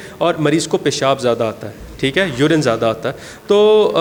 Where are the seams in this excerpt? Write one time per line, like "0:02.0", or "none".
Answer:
none